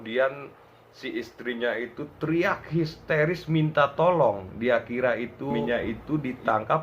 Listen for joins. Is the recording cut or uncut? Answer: cut